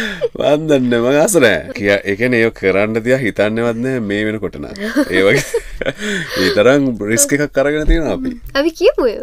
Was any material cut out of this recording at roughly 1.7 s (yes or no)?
yes